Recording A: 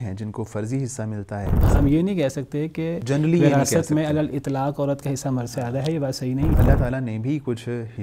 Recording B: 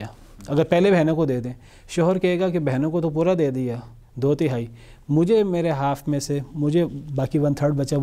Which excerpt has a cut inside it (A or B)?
A